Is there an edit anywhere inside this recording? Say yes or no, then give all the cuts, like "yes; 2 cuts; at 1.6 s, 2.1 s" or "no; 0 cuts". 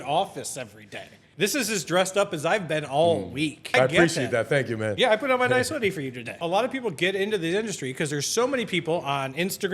yes; 3 cuts; at 1.2 s, 3.6 s, 6.4 s